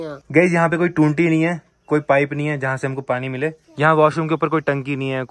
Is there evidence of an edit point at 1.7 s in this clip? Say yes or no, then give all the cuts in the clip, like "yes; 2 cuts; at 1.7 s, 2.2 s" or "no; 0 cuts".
no; 1 cut; at 3.6 s